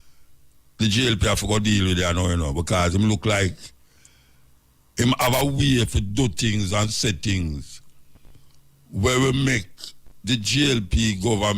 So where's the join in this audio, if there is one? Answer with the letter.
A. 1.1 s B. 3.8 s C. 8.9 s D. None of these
D